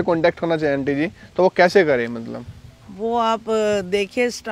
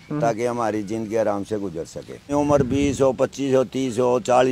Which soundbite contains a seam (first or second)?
second